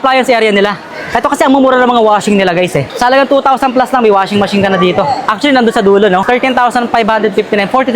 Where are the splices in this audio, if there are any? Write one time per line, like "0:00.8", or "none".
0:02.9
0:06.2